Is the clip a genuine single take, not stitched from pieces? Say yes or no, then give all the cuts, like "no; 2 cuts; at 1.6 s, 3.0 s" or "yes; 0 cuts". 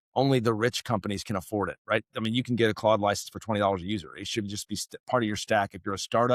yes; 0 cuts